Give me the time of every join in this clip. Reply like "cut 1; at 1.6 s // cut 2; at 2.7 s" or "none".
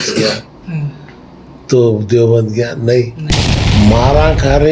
none